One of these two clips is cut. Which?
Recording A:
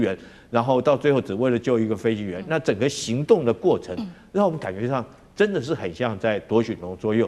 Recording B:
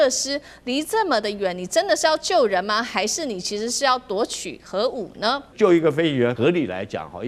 B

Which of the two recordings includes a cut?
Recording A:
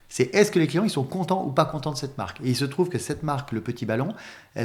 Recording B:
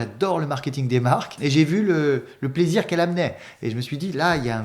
B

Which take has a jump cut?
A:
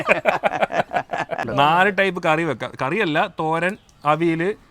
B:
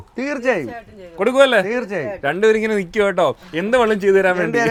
A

